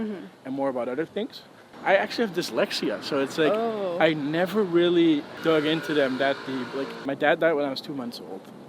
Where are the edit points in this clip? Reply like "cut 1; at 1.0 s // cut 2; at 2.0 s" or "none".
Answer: cut 1; at 1.6 s // cut 2; at 7.0 s